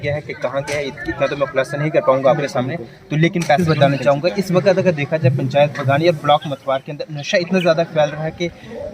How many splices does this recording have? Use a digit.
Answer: 1